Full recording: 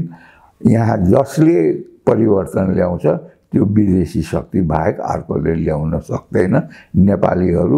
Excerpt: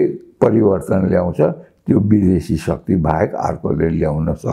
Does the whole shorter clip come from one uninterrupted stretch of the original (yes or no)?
yes